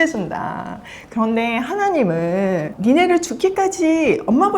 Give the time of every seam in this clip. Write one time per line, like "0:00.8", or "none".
0:02.7